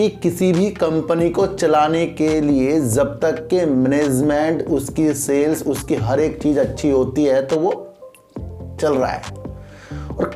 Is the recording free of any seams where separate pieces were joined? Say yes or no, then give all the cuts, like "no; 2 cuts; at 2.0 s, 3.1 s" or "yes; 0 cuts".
yes; 0 cuts